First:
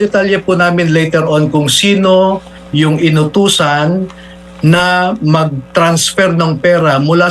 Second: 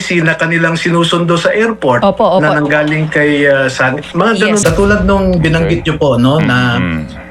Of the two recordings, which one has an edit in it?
second; 1 cut; at 4.6 s

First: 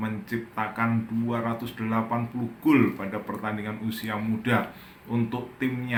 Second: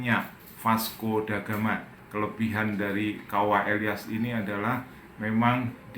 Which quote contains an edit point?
second; 1 cut; at 2.0 s

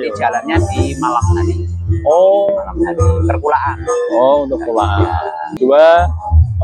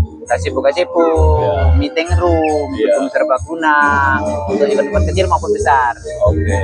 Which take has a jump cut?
first; 1 cut; at 5.5 s

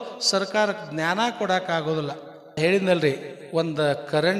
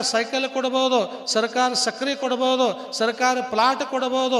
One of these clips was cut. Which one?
first; 1 cut; at 2.6 s

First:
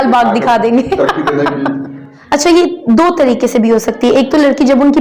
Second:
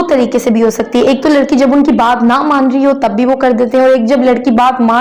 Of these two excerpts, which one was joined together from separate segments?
first; 1 cut; at 2.1 s

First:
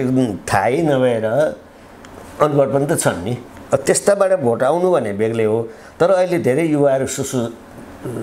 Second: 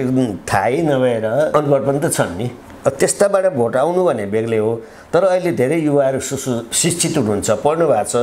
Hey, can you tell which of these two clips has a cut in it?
second; 2 cuts; at 1.5 s, 6.7 s

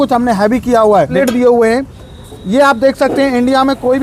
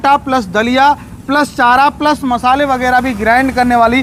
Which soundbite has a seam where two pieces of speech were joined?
first; 1 cut; at 1.1 s

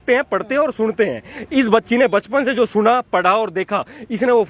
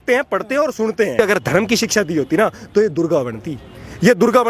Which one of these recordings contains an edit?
second; 1 cut; at 1.2 s

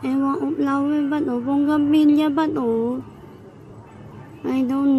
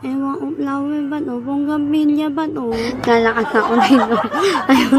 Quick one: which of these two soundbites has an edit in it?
second; 1 cut; at 2.9 s

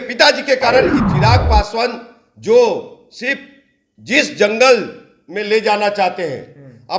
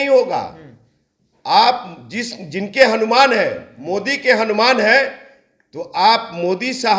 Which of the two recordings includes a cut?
first; 1 cut; at 1.0 s

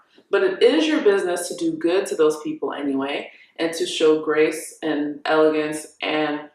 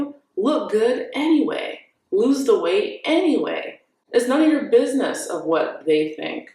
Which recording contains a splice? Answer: second; 1 cut; at 4.0 s

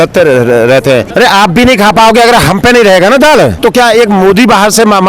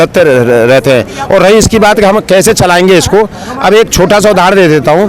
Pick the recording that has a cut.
first; 2 cuts; at 1.1 s, 3.5 s

